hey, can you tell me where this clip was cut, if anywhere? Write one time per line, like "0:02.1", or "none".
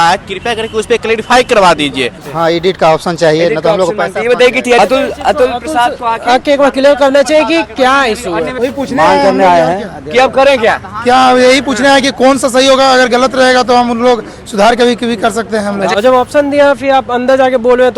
0:02.2
0:04.8
0:08.5
0:15.9